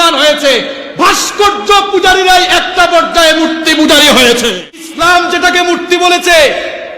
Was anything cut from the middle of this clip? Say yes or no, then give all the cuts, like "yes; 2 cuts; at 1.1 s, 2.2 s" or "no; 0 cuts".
yes; 1 cut; at 4.9 s